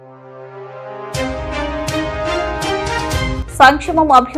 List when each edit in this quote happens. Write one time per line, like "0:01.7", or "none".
0:03.3

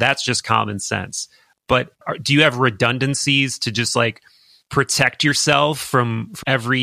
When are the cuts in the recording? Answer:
0:02.0

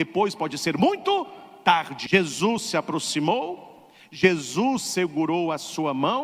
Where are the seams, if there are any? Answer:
0:01.9

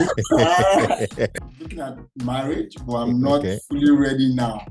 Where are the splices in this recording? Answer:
0:01.3

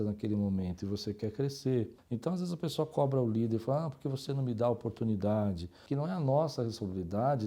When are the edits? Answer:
0:02.0
0:05.7

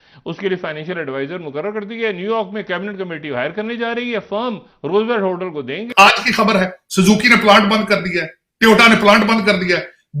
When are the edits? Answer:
0:05.9

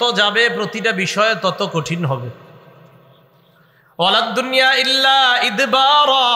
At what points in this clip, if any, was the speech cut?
none

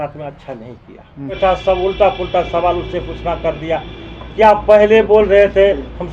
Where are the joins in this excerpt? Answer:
0:01.4

